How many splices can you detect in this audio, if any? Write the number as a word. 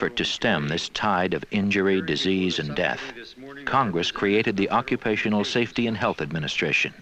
one